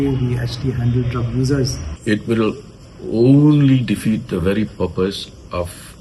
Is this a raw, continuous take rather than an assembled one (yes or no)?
no